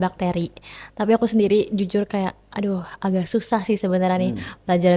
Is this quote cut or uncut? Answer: uncut